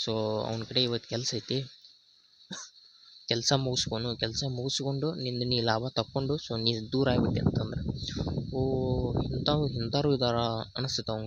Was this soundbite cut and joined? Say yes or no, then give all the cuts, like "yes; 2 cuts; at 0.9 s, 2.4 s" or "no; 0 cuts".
no; 0 cuts